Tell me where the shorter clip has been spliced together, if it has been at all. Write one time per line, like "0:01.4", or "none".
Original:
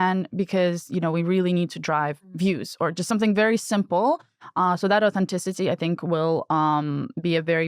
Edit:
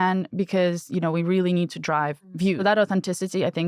0:02.6

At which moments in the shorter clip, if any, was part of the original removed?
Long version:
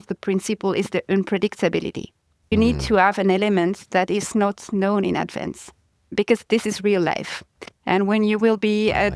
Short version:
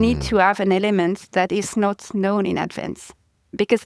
none

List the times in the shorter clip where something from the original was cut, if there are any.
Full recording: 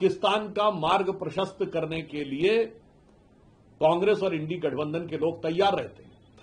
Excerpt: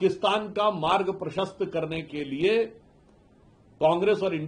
none

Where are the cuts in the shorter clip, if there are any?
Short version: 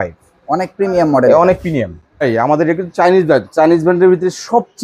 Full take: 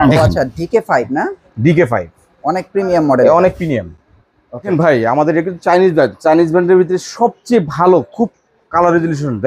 0:02.2

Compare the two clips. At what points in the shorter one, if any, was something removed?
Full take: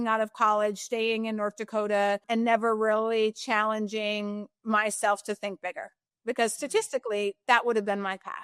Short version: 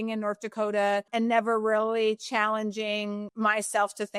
0:03.3

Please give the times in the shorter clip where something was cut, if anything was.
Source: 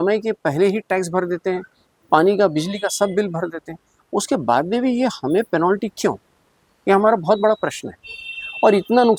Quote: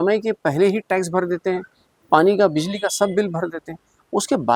none

